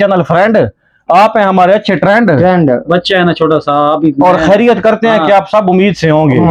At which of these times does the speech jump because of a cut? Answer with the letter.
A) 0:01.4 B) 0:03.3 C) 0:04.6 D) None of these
D